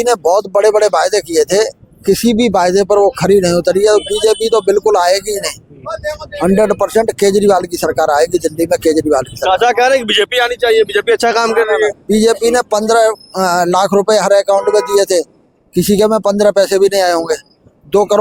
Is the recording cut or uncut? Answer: uncut